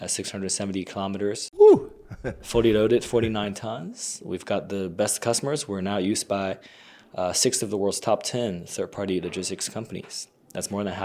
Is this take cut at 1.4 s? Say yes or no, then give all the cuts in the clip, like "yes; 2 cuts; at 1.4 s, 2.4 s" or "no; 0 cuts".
no; 0 cuts